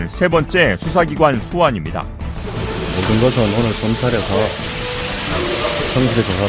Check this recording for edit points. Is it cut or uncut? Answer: cut